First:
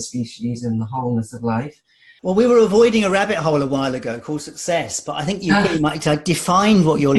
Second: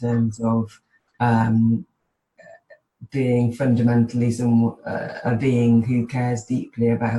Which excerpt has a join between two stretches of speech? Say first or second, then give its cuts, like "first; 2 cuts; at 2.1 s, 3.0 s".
first; 1 cut; at 2.1 s